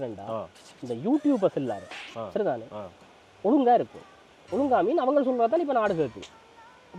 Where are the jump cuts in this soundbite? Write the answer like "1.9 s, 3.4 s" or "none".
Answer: none